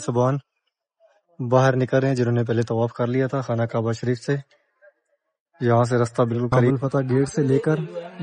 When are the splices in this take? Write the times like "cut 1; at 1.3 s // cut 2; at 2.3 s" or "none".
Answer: cut 1; at 6.7 s